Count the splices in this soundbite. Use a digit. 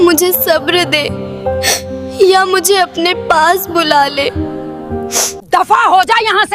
1